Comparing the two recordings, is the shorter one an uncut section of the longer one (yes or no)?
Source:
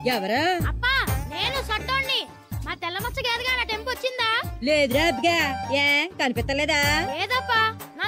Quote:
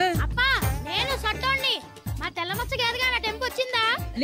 yes